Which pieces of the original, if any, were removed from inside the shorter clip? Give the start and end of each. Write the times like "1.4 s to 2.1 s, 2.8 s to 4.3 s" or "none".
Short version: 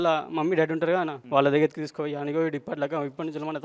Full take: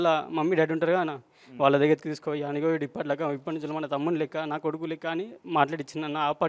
1.2 s to 1.5 s